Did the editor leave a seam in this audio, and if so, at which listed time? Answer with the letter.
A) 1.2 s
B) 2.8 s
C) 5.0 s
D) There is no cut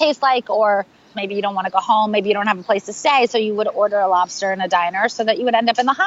A